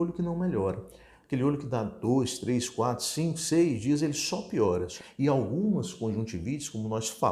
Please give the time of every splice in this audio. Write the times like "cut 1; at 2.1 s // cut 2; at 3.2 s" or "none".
cut 1; at 4.9 s